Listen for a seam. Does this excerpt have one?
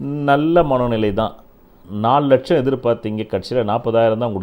no; 0 cuts

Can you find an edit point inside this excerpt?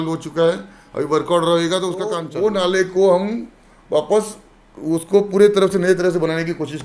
yes; 1 cut; at 2.2 s

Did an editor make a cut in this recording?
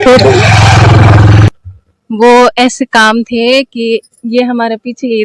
yes; 1 cut; at 1.5 s

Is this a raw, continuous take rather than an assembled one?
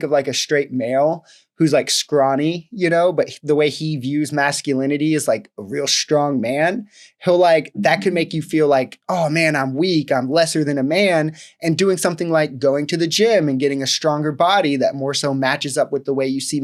yes; 0 cuts

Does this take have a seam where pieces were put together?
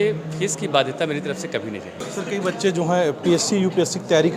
yes; 1 cut; at 2.0 s

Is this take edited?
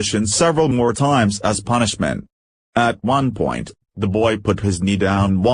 no; 0 cuts

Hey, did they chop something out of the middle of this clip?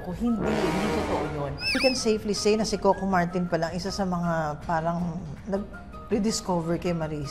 yes; 1 cut; at 1.8 s

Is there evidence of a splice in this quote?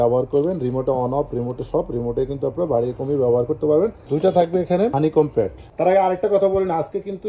yes; 2 cuts; at 4.0 s, 5.6 s

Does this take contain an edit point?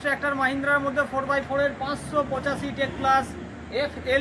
no; 0 cuts

